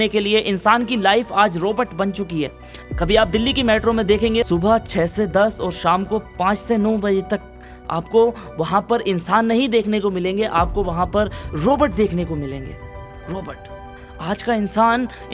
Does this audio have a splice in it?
no; 0 cuts

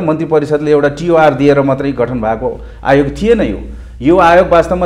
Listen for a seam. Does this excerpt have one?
no; 0 cuts

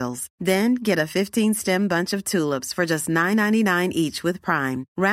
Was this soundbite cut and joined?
no; 0 cuts

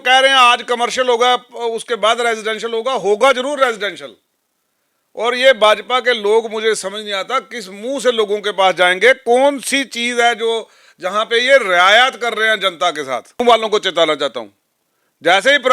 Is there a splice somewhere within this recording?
yes; 1 cut; at 13.4 s

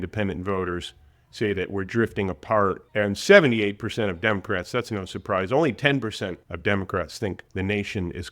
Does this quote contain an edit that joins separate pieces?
yes; 3 cuts; at 2.8 s, 6.5 s, 7.4 s

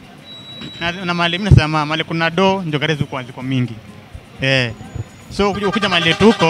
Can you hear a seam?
no; 0 cuts

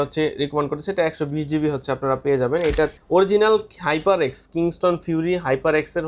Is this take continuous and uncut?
no; 1 cut; at 3.0 s

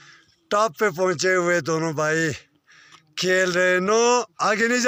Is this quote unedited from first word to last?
yes; 0 cuts

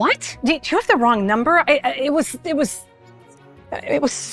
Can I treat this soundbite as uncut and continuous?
yes; 0 cuts

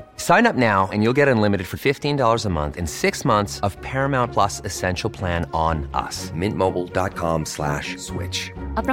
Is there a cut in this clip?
no; 0 cuts

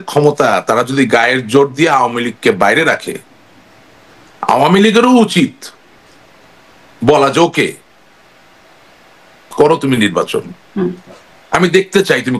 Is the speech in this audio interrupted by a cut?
no; 0 cuts

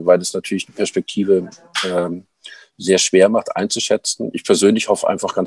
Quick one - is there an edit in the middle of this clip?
no; 0 cuts

